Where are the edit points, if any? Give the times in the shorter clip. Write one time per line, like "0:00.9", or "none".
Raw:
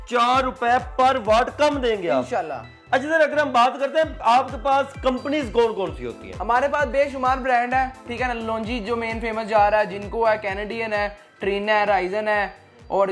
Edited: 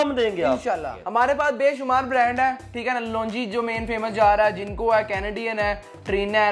0:00.9